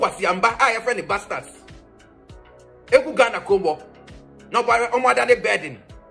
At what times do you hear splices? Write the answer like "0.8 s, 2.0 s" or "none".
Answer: none